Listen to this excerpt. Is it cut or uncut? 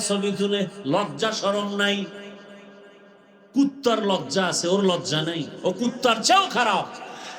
uncut